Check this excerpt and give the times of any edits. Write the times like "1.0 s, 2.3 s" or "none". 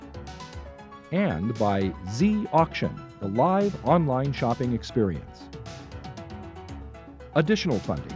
1.0 s